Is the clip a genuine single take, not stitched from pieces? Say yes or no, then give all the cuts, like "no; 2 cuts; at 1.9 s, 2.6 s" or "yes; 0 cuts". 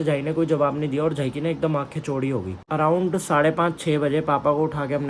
no; 1 cut; at 2.6 s